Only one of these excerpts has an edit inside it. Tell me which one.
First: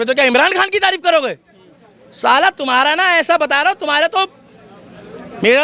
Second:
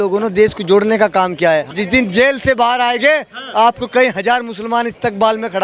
second; 1 cut; at 1.7 s

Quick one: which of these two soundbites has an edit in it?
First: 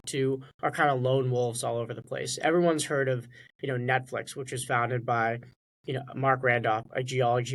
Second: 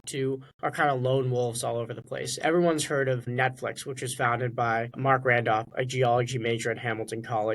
second; 2 cuts; at 3.3 s, 4.9 s

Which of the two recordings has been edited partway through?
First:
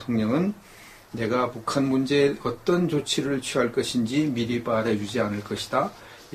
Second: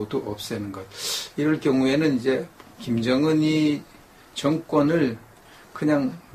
first; 1 cut; at 4.0 s

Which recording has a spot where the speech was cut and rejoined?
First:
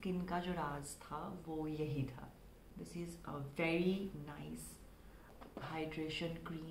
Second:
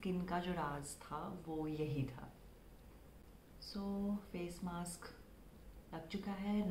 first; 2 cuts; at 2.7 s, 5.3 s

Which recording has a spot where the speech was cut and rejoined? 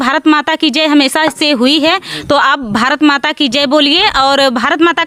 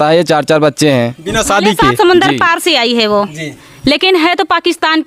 second; 1 cut; at 1.8 s

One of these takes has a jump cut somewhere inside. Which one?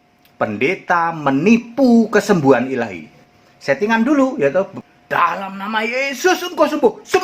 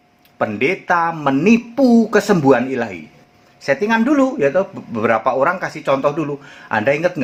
first; 1 cut; at 4.8 s

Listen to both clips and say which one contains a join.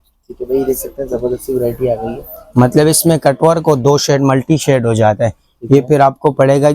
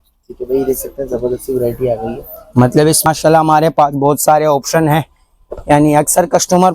second; 1 cut; at 3.1 s

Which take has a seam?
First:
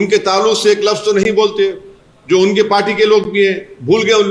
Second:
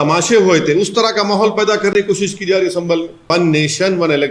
second; 1 cut; at 3.3 s

